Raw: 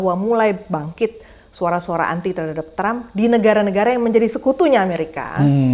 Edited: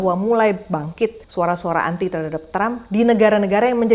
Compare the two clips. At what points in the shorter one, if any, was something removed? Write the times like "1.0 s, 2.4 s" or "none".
1.2 s